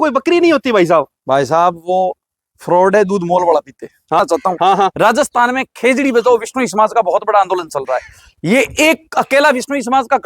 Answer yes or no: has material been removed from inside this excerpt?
yes